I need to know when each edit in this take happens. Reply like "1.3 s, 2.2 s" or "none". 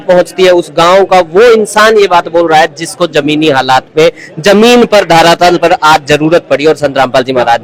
none